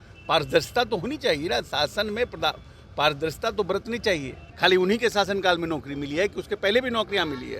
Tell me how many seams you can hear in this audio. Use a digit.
1